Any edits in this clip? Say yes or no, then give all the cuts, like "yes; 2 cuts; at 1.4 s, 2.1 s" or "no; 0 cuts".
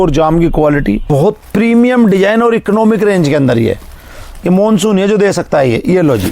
yes; 1 cut; at 1.0 s